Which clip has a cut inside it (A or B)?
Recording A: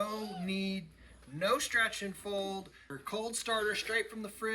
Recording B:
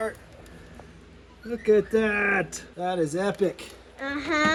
A